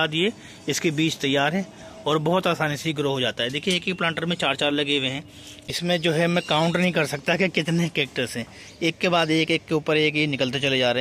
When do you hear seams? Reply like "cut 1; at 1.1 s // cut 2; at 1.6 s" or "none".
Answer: cut 1; at 5.7 s